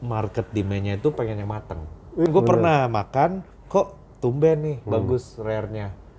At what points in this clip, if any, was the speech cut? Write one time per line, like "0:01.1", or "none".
0:02.3